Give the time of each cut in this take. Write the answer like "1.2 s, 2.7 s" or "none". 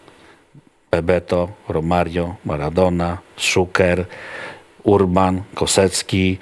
none